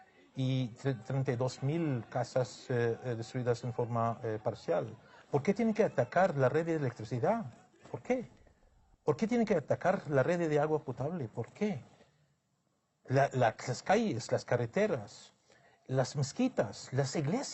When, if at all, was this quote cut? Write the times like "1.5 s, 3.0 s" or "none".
3.7 s